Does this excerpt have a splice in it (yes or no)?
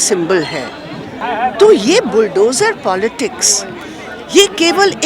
yes